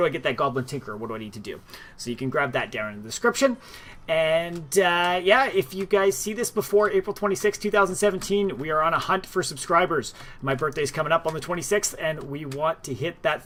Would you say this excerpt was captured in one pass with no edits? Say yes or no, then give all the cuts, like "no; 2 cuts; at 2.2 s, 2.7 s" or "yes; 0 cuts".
yes; 0 cuts